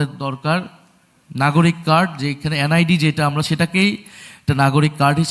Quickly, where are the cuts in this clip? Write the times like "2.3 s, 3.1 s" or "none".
none